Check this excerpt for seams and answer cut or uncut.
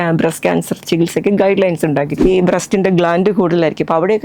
cut